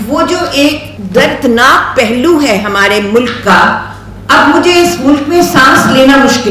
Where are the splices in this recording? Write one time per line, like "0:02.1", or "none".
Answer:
0:00.9